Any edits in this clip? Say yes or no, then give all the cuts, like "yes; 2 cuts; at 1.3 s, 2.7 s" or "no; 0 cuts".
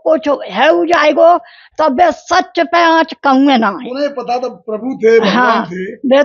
no; 0 cuts